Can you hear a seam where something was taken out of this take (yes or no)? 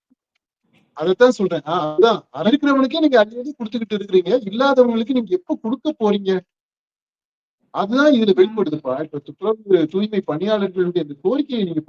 yes